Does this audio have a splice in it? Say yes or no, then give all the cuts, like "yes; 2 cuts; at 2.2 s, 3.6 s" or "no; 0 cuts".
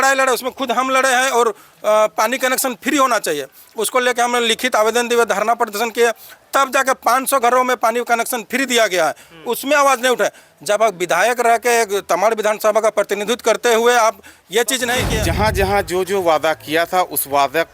yes; 1 cut; at 15.1 s